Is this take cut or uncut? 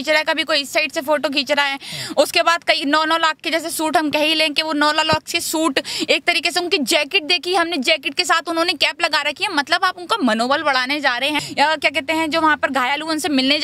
cut